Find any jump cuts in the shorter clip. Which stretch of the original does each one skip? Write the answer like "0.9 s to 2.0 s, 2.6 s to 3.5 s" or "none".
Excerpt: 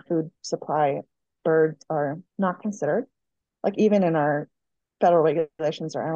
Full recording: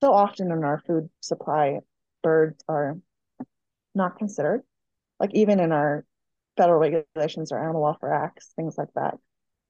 3.0 s to 3.8 s